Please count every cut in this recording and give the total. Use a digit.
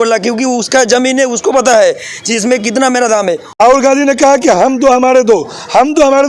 1